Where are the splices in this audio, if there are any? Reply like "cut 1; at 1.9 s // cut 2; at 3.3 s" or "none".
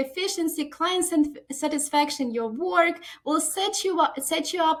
none